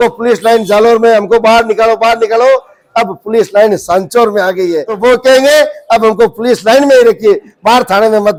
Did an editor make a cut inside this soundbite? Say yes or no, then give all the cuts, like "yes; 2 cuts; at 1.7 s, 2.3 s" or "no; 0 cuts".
no; 0 cuts